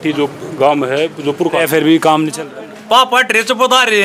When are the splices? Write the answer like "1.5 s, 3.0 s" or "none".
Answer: 1.6 s